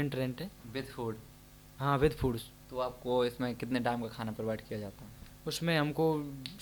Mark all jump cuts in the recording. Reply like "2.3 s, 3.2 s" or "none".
none

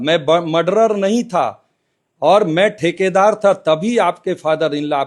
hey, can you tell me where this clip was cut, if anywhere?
none

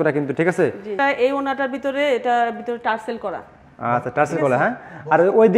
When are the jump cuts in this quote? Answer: 0.9 s

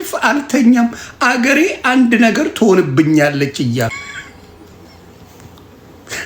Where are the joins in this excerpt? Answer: 3.9 s

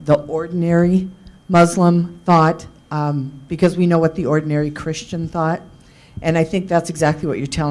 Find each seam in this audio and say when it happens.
none

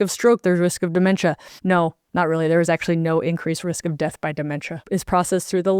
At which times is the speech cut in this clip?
1.7 s, 4.8 s

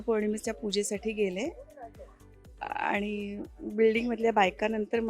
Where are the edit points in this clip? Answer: none

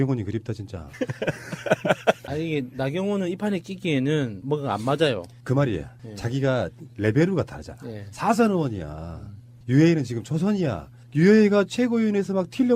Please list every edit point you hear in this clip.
2.2 s

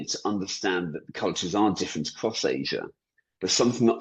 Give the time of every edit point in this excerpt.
1.1 s

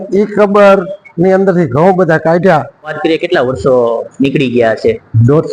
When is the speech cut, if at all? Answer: 2.9 s

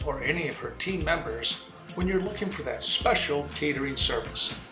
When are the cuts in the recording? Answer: 2.0 s

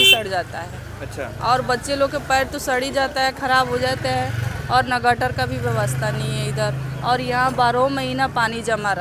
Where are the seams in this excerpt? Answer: none

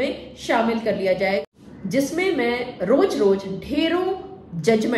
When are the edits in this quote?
1.6 s

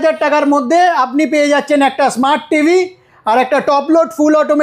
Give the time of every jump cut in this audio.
none

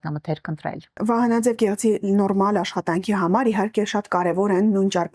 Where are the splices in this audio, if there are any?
1.0 s

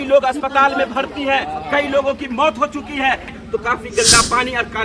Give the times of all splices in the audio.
3.4 s

